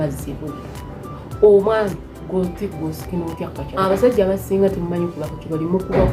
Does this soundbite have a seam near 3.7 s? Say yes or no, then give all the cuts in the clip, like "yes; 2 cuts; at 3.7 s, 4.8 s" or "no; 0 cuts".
yes; 1 cut; at 3.7 s